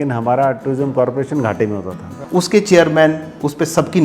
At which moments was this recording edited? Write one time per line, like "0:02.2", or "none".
0:02.1